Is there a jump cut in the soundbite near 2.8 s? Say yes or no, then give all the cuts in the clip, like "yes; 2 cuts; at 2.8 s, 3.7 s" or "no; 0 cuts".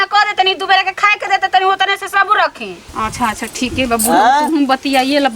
yes; 1 cut; at 2.8 s